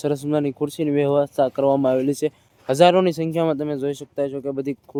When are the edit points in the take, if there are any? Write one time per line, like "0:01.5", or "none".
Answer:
none